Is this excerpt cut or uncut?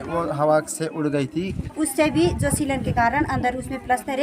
cut